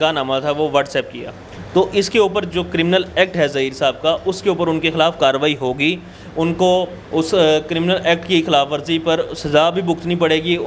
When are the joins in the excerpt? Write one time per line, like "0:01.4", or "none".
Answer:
0:01.3